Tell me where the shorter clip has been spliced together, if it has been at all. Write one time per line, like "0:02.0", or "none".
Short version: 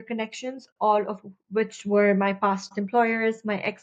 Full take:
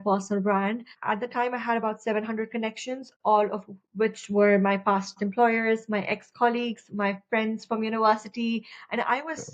none